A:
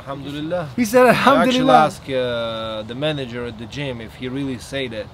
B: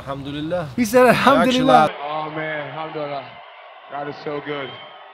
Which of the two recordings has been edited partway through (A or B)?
A